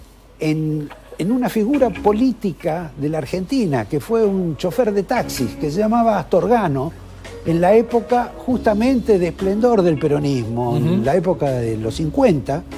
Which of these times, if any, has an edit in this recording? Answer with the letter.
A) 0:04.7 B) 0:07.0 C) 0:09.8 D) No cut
D